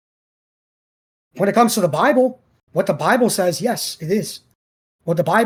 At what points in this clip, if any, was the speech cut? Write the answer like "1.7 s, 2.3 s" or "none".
none